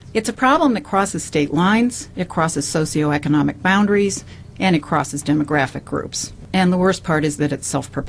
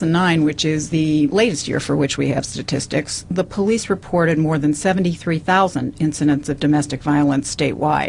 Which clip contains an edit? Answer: second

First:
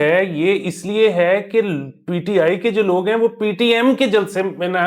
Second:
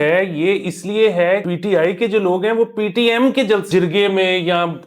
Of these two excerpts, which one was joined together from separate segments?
second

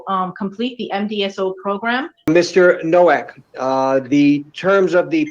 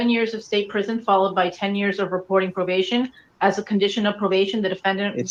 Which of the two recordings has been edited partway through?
first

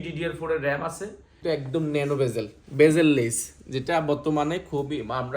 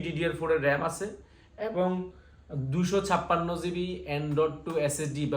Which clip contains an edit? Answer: first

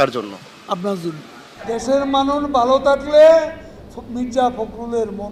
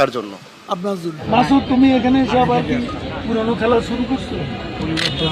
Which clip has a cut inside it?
second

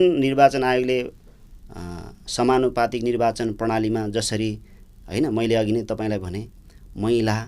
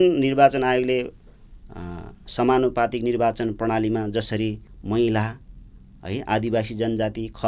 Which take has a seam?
second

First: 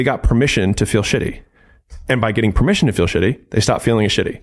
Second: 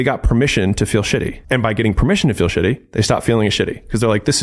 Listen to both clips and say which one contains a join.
second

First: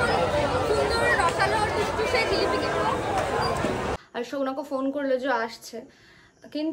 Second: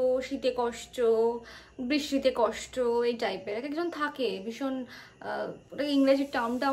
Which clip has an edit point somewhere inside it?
first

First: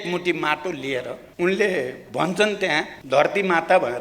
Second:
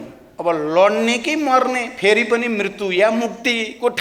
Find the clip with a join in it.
first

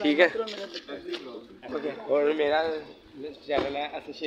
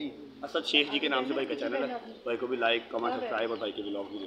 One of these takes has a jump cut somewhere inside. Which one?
first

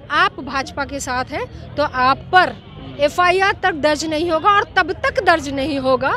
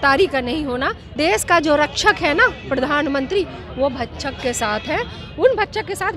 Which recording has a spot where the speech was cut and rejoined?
second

